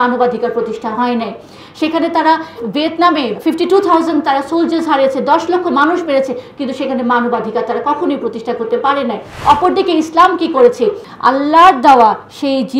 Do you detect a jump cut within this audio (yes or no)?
yes